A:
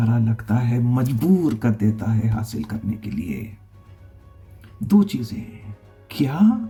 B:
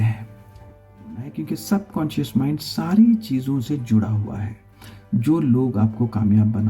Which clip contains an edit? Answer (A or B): B